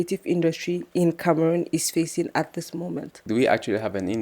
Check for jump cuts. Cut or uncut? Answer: cut